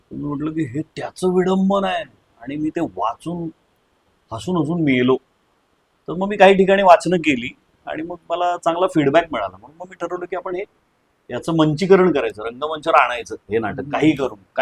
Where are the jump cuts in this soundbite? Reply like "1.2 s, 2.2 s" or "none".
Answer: none